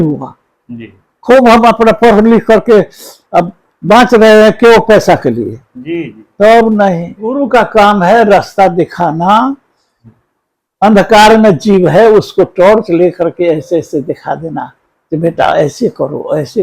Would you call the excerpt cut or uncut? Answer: cut